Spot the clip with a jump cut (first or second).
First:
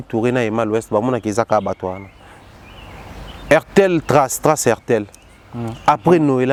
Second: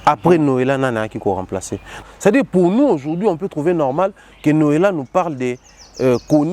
second